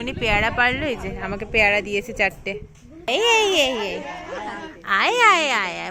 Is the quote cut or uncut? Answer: cut